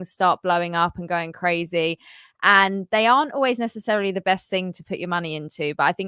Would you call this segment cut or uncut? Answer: uncut